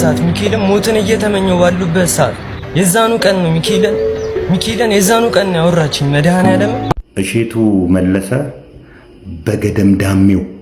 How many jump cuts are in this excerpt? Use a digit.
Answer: 1